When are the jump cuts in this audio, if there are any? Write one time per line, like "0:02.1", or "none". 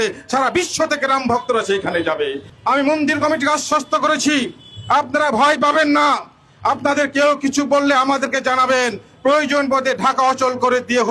0:02.5